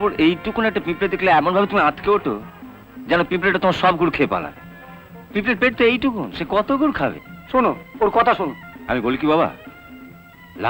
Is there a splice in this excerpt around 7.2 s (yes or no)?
no